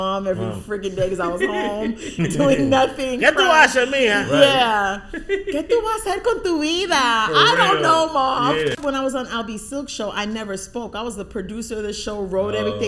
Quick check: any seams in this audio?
yes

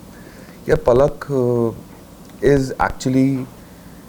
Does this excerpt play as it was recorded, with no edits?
yes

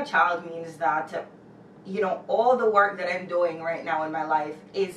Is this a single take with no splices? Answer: yes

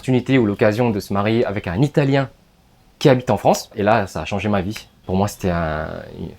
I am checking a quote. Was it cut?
yes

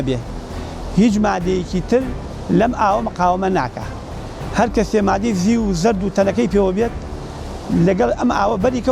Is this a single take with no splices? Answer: yes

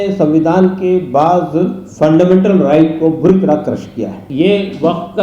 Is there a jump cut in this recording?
yes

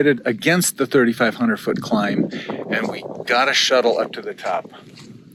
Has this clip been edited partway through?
no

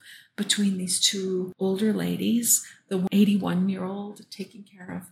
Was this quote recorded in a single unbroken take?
no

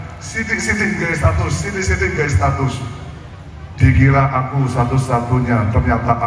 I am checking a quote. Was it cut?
no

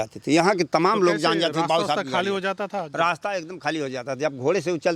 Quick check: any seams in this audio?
no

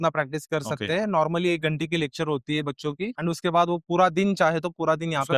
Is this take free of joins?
yes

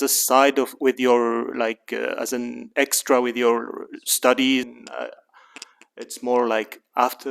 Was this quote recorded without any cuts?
no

